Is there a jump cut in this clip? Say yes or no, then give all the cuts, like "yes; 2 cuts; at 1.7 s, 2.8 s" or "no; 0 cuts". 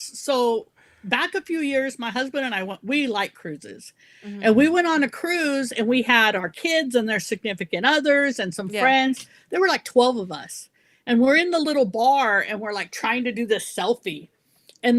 no; 0 cuts